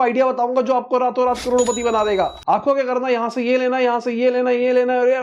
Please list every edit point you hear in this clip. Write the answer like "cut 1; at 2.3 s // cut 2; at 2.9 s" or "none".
none